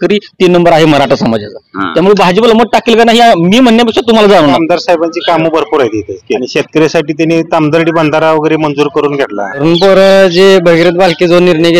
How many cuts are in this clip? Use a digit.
3